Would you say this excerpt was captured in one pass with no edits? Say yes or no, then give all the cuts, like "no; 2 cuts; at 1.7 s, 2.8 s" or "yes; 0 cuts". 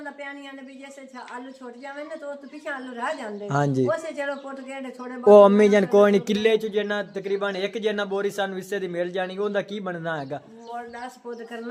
yes; 0 cuts